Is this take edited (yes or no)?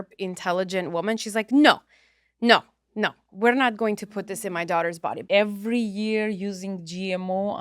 yes